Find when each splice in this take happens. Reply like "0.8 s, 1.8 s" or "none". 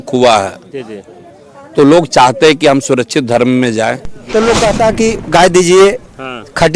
4.1 s